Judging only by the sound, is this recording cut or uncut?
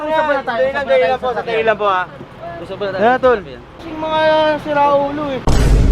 cut